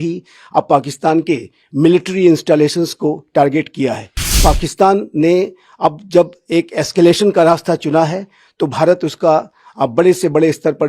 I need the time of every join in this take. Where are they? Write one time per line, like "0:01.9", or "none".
0:04.4